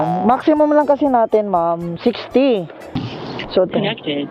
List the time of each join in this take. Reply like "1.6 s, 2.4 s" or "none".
3.0 s